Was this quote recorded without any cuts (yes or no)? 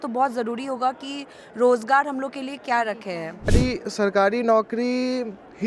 no